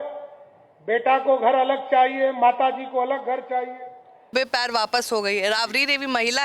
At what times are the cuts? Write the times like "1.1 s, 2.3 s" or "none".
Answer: 4.3 s